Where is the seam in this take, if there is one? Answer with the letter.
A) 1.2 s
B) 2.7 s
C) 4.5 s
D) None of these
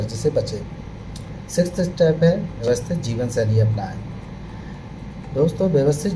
B